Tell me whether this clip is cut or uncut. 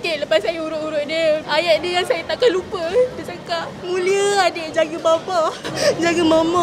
cut